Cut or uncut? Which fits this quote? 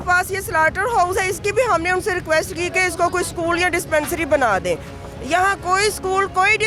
uncut